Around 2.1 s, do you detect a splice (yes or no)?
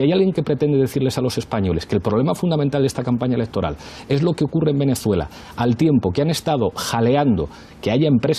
yes